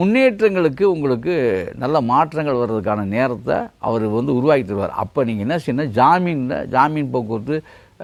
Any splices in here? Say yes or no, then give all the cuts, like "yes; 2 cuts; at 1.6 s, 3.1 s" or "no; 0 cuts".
no; 0 cuts